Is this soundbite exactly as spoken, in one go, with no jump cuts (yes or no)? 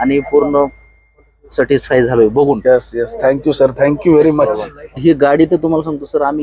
no